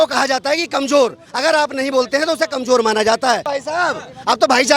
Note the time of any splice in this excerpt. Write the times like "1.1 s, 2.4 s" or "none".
3.5 s